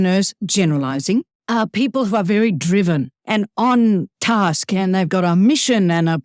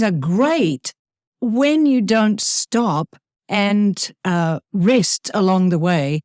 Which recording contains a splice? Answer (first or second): first